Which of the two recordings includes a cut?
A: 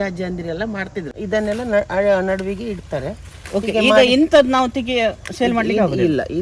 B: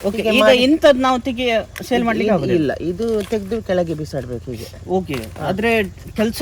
A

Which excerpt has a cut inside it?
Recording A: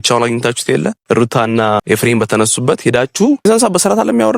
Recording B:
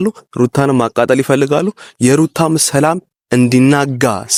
A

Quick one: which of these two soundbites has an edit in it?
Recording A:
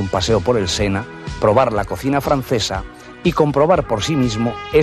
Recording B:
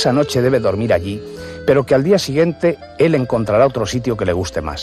B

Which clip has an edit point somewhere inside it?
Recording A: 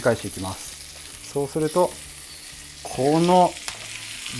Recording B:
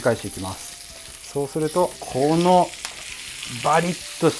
B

